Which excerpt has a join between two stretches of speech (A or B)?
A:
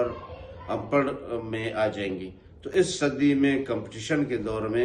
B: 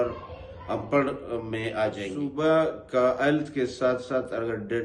B